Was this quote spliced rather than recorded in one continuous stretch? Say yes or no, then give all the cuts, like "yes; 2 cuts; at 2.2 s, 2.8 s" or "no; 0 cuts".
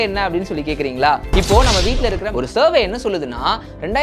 yes; 1 cut; at 2.2 s